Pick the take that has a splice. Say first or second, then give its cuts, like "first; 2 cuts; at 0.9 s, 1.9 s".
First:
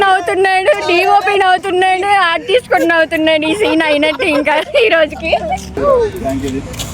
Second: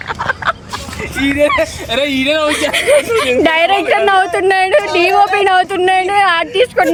first; 1 cut; at 5.8 s